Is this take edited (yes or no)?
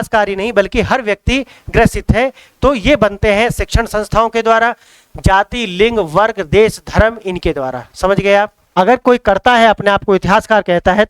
yes